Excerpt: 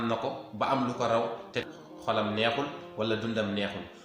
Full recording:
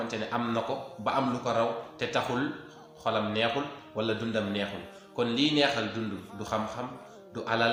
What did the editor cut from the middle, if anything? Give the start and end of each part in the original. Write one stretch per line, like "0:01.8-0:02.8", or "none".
0:02.1-0:02.6